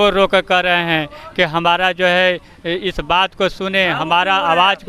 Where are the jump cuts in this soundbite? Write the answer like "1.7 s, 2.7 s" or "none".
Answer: none

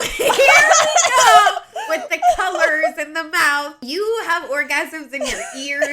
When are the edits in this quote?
3.8 s

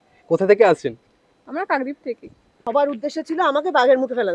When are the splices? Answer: 2.7 s

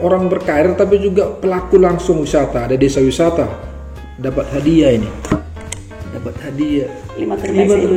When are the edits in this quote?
none

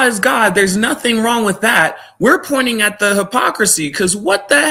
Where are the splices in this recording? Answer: none

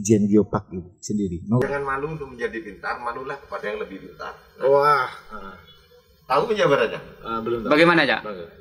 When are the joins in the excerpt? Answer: 1.6 s

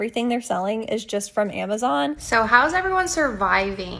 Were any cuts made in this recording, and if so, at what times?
2.2 s

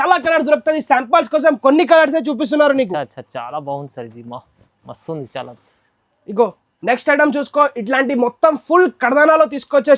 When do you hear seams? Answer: none

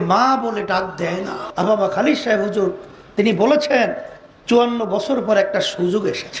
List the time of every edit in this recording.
1.7 s

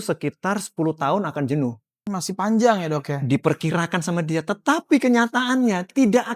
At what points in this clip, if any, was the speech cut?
2.1 s

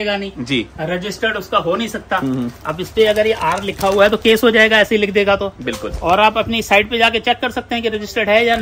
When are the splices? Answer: none

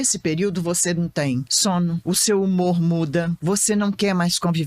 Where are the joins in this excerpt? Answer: 1.7 s, 3.3 s

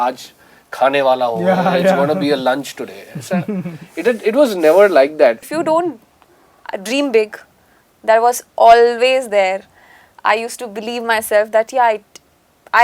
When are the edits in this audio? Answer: 5.4 s

